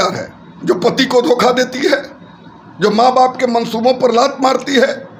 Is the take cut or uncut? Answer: uncut